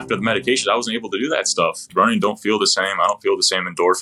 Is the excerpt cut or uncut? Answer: cut